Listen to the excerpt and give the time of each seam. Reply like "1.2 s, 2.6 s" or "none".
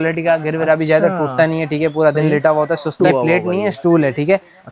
3.0 s